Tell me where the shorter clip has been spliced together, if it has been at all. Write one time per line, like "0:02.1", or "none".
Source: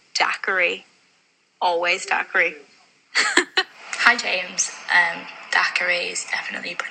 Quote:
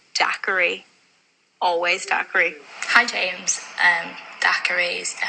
0:02.7